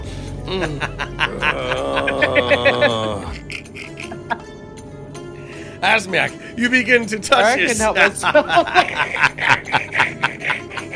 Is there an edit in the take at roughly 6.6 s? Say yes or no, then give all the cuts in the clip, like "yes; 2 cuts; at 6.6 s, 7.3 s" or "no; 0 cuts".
no; 0 cuts